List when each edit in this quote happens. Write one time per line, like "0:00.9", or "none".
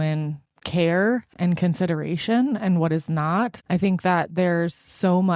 0:03.6